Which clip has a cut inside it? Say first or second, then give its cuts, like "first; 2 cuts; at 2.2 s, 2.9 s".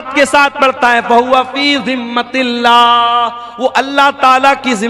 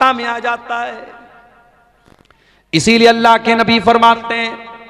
second; 1 cut; at 2.2 s